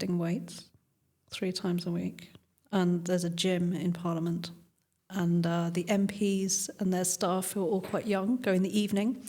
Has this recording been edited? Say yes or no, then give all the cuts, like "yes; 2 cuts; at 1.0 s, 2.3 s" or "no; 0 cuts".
no; 0 cuts